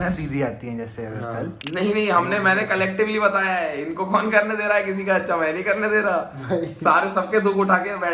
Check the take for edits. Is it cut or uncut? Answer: cut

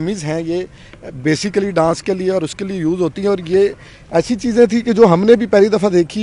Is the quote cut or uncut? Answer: uncut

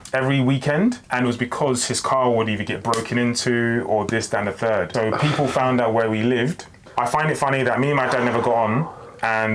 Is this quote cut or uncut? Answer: cut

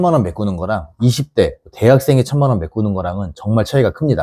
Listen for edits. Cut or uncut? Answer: uncut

